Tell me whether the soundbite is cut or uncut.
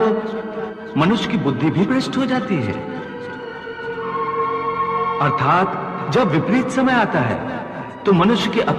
uncut